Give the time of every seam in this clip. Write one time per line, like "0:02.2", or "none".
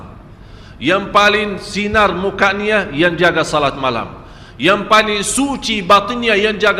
none